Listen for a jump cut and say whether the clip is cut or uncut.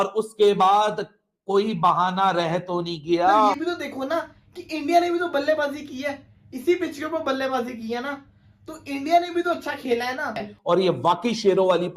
cut